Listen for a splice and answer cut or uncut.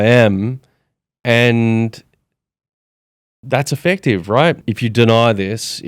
cut